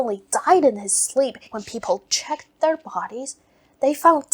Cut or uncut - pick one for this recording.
cut